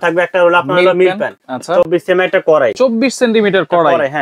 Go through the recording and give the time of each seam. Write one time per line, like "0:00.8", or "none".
none

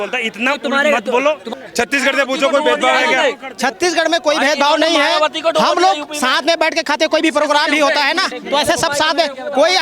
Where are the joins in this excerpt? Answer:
0:01.5

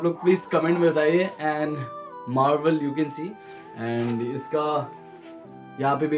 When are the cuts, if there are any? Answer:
none

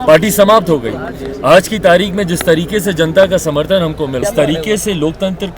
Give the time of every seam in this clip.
0:04.2

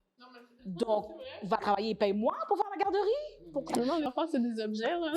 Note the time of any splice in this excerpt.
0:04.1

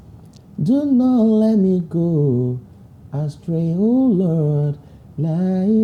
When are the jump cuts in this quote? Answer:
none

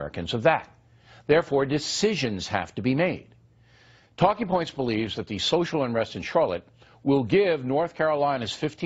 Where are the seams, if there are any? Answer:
none

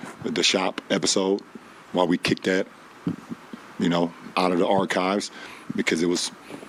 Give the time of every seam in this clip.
none

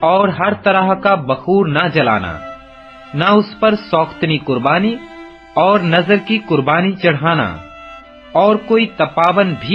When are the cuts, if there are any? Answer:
none

